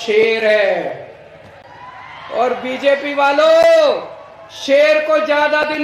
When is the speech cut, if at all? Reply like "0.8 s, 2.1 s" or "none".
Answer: none